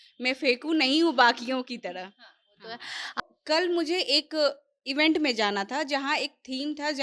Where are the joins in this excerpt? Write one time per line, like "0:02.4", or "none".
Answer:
0:03.2